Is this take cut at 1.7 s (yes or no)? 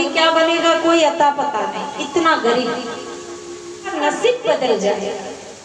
no